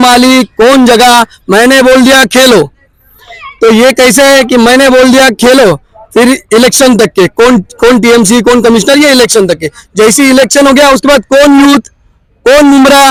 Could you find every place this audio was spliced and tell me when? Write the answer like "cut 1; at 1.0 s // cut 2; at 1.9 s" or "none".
none